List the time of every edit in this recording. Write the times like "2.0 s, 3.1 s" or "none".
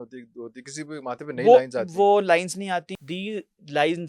2.9 s

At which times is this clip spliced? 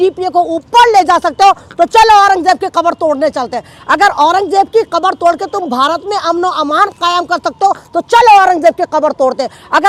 none

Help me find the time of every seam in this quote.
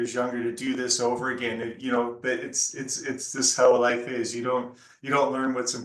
none

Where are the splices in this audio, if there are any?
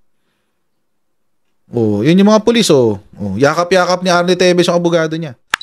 none

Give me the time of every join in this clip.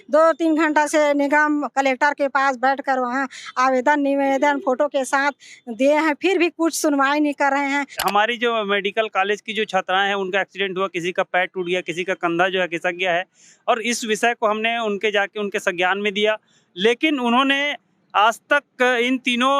7.9 s

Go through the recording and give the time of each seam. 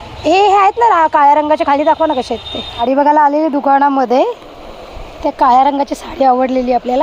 2.8 s

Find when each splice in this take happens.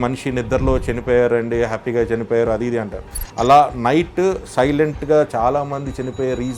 5.3 s

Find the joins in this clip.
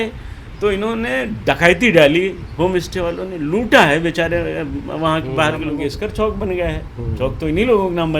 5.8 s

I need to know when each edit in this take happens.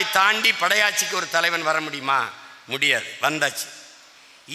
none

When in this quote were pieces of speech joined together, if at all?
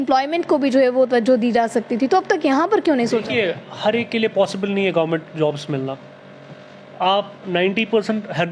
none

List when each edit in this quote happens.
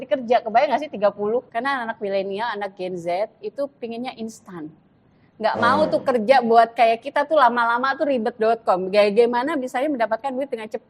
1.5 s

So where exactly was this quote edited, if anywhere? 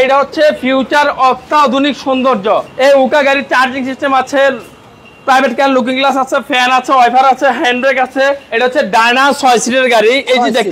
2.7 s, 8.5 s

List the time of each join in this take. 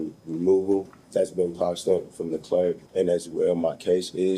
1.0 s, 2.8 s

